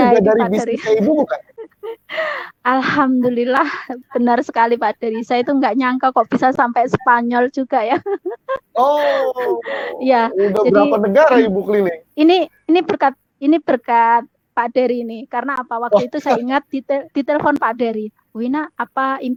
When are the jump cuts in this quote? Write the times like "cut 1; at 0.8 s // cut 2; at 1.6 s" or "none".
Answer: none